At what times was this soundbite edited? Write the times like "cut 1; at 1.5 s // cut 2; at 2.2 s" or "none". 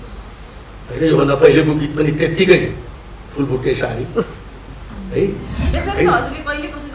cut 1; at 5.7 s